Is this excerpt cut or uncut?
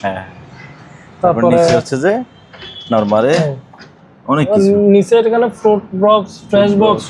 uncut